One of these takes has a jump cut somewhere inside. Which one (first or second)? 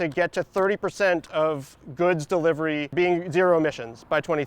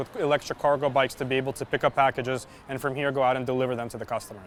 first